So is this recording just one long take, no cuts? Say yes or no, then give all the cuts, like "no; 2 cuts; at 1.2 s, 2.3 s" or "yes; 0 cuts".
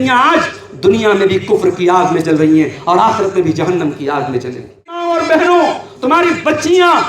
no; 1 cut; at 5.0 s